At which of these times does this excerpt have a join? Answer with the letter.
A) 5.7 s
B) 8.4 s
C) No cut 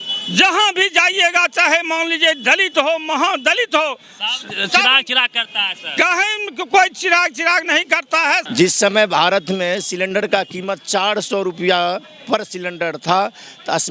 B